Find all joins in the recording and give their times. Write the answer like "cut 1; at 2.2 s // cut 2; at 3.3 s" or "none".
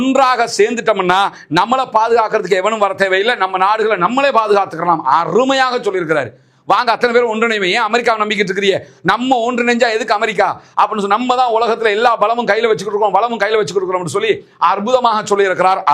none